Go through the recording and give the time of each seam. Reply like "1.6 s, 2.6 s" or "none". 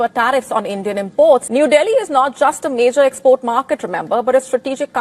1.5 s